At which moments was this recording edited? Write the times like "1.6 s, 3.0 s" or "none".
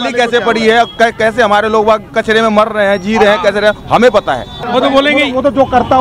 4.6 s